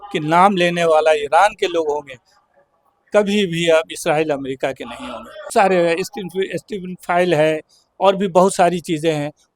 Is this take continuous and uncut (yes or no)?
no